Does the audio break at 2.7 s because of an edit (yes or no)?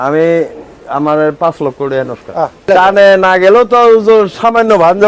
yes